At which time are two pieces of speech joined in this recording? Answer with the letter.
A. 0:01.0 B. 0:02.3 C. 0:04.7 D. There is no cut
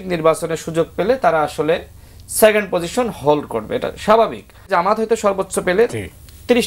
C